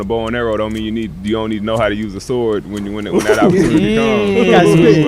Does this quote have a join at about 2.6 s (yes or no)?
no